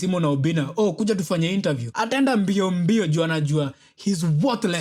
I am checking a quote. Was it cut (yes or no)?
no